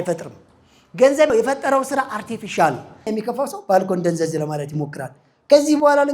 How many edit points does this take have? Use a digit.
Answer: 2